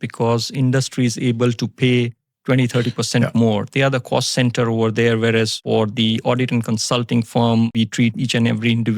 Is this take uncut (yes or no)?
no